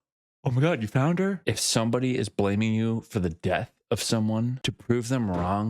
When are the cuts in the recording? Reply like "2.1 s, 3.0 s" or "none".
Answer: 1.4 s